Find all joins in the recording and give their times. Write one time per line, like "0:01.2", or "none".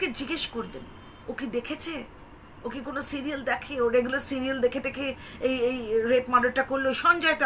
none